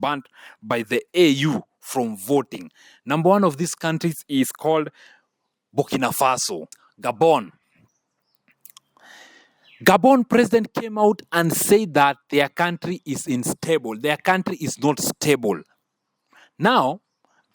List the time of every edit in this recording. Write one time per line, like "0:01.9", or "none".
0:06.8